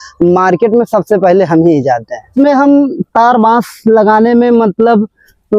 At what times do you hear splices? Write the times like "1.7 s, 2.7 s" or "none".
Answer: 2.3 s